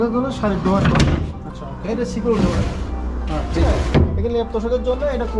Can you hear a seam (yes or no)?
no